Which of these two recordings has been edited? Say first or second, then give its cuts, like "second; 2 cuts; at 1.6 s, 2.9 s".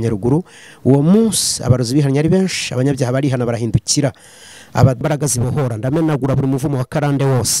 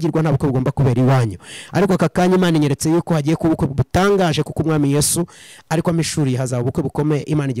first; 1 cut; at 5.0 s